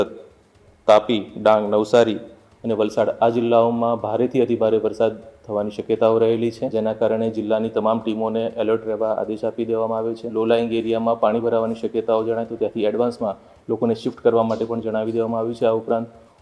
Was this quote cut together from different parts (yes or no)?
yes